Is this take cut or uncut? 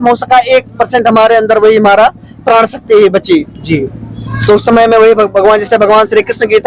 uncut